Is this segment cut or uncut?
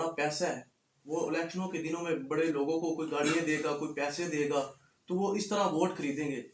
uncut